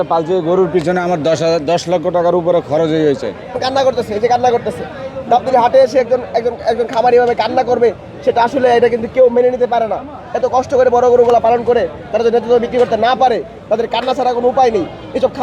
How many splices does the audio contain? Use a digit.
1